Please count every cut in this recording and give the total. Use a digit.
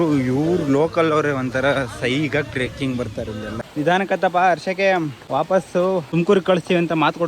3